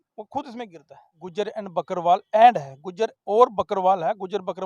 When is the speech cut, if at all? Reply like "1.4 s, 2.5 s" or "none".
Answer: 1.2 s